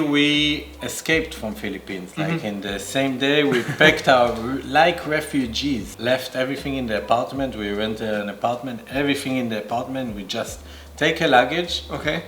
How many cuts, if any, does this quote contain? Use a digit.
0